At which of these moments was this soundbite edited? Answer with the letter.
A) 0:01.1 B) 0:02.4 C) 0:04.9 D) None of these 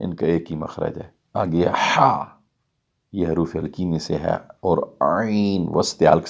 A